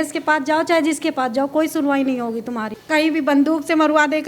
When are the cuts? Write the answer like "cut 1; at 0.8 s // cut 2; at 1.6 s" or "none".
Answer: cut 1; at 2.7 s